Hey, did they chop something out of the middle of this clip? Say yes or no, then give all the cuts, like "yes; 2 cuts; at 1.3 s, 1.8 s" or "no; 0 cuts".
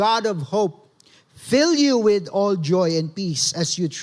no; 0 cuts